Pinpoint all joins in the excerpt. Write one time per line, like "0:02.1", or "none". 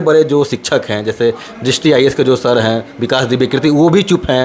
none